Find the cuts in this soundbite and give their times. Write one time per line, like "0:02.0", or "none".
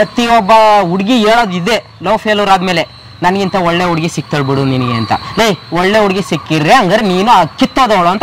none